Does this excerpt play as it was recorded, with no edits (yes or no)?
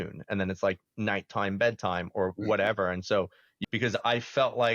no